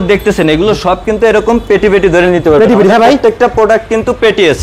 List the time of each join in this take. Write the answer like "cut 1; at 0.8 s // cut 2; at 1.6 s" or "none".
none